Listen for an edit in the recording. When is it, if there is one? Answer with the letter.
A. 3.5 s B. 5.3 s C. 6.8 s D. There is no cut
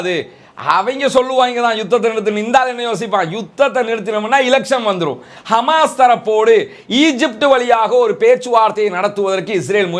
B